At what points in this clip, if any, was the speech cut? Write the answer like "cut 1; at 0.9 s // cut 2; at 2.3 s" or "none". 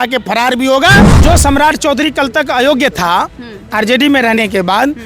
cut 1; at 1.1 s